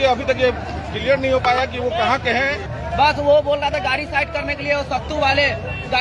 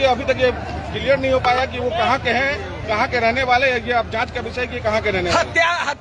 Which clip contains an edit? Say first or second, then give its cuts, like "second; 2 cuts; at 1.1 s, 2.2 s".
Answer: first; 1 cut; at 2.7 s